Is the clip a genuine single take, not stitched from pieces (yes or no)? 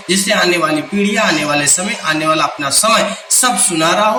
yes